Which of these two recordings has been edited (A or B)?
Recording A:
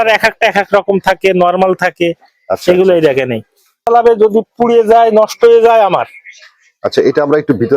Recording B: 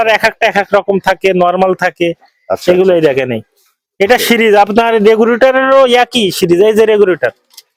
A